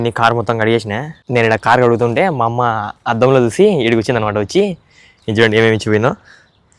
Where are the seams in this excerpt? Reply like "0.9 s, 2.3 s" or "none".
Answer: 1.1 s